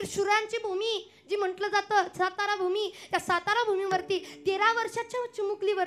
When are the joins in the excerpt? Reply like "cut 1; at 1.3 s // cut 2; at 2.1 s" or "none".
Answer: none